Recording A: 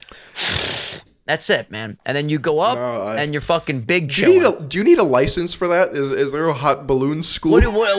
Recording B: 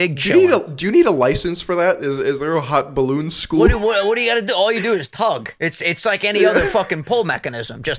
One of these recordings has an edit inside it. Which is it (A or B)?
B